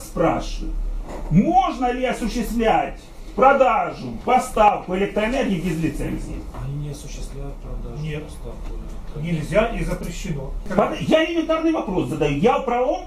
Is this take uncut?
no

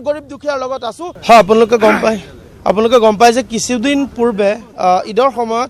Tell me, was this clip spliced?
yes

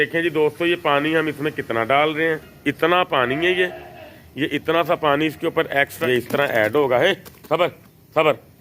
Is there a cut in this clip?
yes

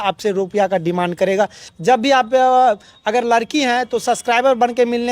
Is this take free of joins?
no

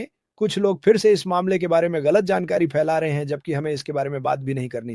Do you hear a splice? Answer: no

